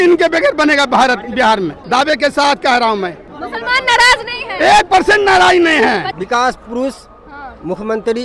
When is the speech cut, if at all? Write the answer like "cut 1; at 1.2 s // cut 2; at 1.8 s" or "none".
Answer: cut 1; at 1.8 s // cut 2; at 3.3 s // cut 3; at 6.2 s